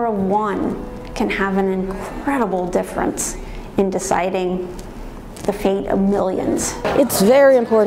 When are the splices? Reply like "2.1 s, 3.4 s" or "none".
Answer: 6.8 s